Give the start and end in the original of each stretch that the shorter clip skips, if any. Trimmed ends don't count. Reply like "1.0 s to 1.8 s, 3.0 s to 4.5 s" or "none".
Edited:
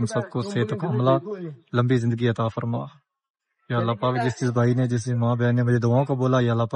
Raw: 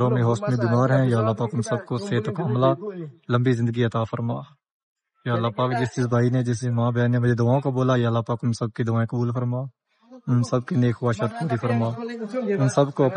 none